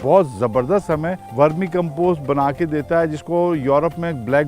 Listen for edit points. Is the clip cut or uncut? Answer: cut